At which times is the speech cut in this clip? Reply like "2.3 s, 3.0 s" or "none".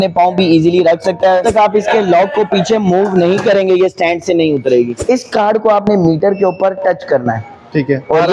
1.4 s, 4.9 s

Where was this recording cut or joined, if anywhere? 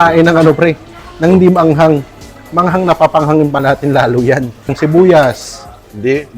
4.7 s

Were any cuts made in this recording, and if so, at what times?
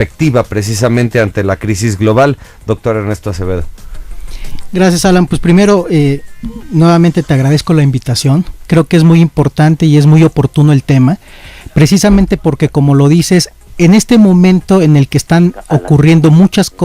5.7 s

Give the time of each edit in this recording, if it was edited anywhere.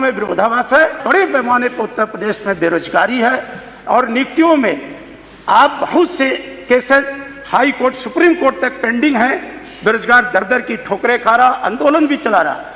1.0 s

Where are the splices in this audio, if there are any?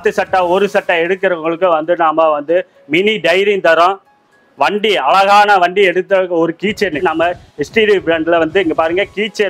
7.0 s

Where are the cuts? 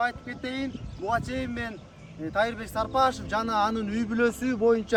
none

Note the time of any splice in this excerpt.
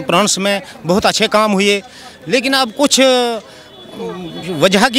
none

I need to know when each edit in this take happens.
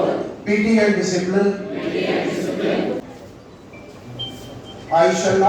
3.1 s

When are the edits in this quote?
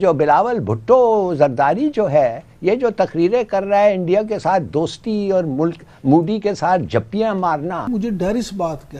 7.8 s

